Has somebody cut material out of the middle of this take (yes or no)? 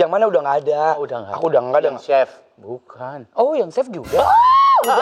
no